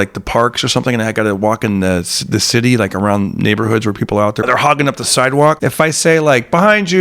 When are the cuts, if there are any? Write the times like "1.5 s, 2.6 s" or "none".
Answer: 4.4 s, 5.6 s